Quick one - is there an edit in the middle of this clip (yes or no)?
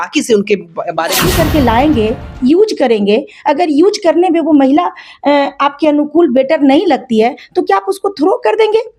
yes